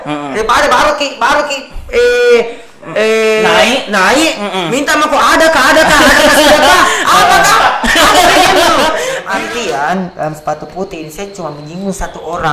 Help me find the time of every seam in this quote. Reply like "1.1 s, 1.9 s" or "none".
9.2 s

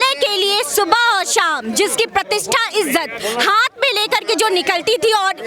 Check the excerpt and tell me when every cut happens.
none

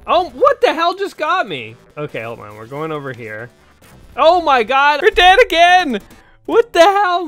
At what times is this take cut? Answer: 1.9 s, 5.0 s

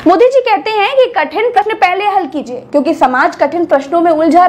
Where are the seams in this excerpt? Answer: 1.6 s

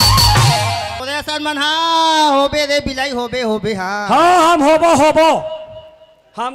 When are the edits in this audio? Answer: 1.0 s

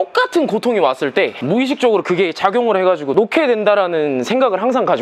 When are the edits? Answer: 1.4 s, 3.1 s

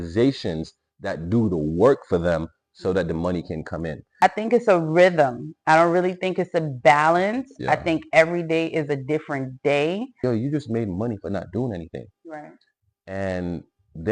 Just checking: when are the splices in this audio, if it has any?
4.1 s, 10.2 s

